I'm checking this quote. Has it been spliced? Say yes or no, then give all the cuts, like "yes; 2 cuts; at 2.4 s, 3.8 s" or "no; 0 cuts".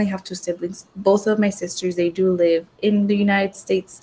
no; 0 cuts